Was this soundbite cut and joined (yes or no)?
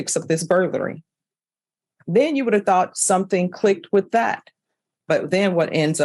no